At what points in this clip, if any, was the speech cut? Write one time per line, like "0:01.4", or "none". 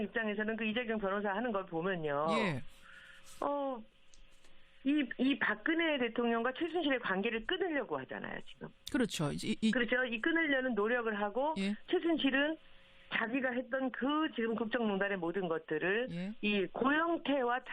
none